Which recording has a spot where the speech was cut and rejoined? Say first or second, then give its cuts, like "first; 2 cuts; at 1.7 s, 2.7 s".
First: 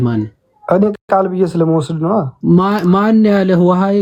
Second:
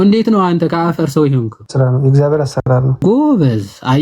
second; 2 cuts; at 1.6 s, 3.0 s